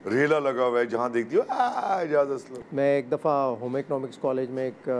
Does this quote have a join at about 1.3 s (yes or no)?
no